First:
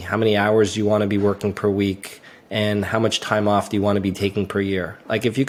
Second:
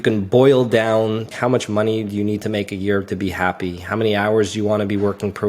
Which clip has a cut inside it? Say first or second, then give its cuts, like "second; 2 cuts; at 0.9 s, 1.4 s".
second; 1 cut; at 1.3 s